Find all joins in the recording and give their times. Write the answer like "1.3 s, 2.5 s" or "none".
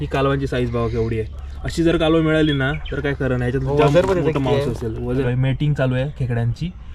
5.3 s